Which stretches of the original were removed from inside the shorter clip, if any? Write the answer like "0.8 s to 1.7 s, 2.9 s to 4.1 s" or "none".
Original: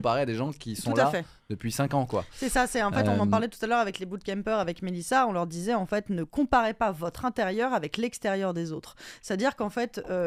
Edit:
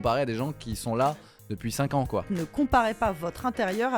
2.3 s to 6.1 s